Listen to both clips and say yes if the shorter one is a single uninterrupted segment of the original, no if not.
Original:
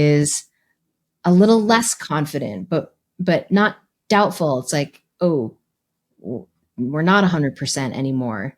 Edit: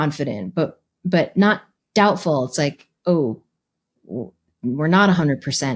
yes